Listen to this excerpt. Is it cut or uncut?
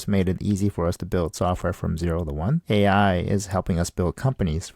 cut